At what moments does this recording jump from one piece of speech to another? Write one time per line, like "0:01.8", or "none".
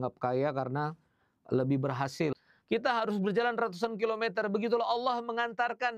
0:02.4